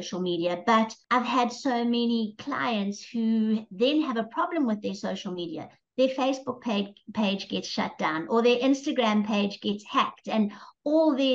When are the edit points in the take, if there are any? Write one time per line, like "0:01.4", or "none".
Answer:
0:01.0

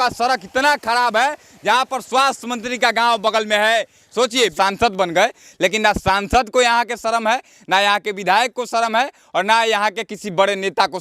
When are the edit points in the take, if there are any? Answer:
0:04.5

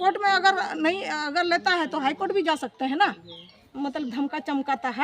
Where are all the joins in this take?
0:03.6

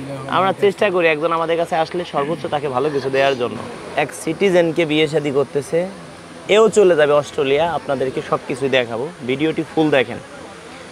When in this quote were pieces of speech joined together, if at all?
0:03.7

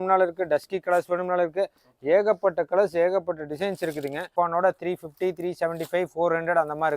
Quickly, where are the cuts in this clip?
0:04.3

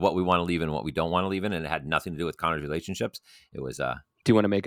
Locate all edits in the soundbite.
none

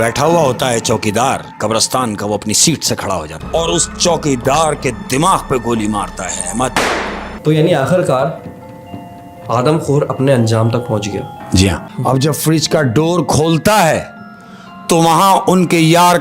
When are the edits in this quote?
0:03.4
0:06.8
0:11.9

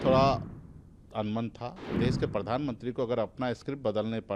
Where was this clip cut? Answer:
0:01.9

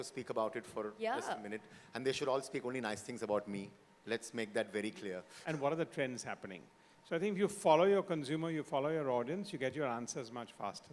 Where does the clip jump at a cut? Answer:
0:05.3

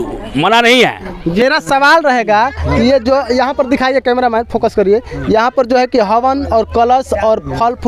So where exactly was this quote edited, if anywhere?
0:01.4

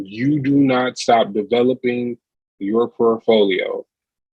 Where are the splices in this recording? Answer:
none

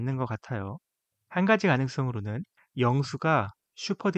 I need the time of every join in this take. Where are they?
0:02.7

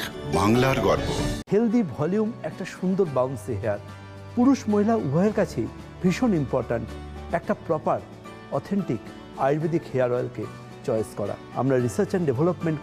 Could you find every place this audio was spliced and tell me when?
0:01.3

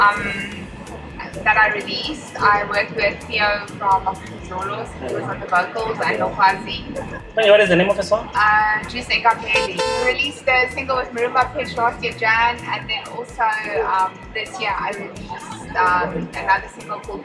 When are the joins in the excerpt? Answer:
0:09.9

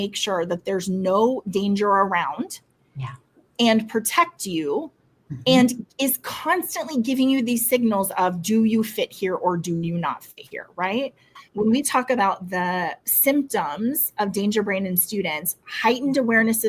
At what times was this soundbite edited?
0:11.3

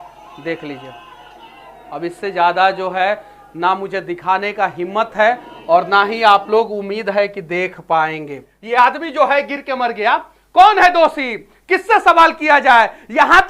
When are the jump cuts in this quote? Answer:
0:08.5

